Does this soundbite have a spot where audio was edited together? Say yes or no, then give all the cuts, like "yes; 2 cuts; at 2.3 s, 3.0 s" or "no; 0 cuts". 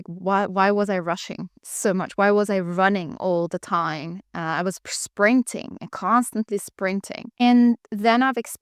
no; 0 cuts